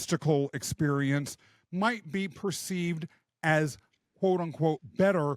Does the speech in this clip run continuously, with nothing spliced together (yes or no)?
yes